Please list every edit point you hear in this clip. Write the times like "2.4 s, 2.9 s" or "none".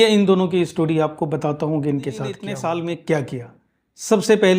2.5 s